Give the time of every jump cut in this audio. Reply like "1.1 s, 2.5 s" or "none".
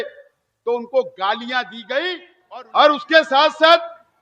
2.3 s